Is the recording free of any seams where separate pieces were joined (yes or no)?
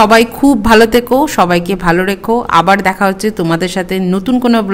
yes